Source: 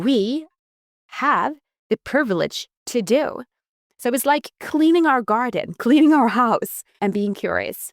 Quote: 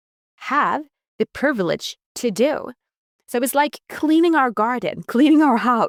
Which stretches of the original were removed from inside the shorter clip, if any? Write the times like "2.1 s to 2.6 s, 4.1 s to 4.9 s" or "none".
none